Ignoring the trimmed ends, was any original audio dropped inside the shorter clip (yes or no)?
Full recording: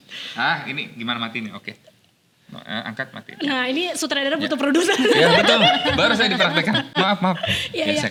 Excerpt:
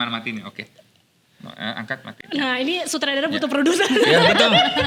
no